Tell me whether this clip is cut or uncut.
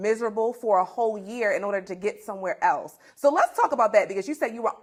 uncut